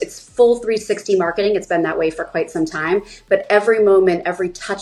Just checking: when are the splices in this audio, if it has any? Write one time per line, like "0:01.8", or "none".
none